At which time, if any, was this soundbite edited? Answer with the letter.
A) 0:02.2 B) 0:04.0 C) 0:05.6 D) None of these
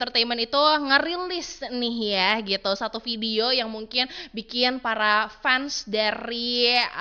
D